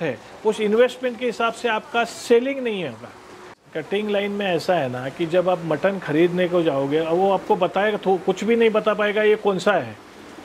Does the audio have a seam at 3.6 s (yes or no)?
yes